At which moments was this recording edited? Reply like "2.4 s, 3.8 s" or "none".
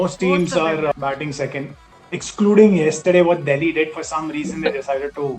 0.9 s